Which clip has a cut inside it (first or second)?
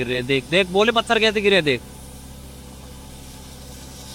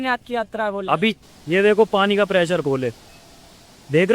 second